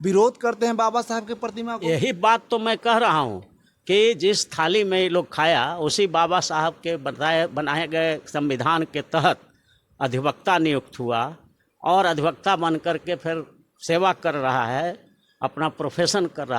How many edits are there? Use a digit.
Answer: 0